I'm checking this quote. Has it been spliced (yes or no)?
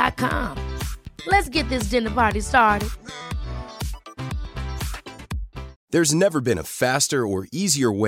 yes